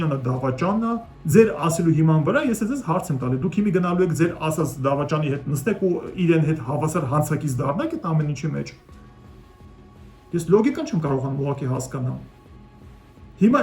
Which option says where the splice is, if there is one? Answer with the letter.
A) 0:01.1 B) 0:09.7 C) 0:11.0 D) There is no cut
A